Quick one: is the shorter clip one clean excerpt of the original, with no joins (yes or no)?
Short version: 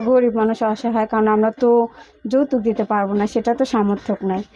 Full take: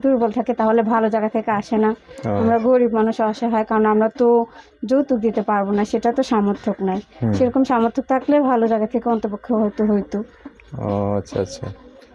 yes